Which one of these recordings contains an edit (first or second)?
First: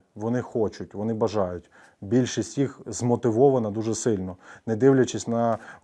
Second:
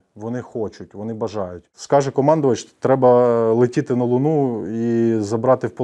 second